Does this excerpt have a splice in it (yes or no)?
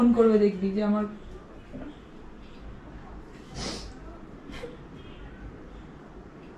no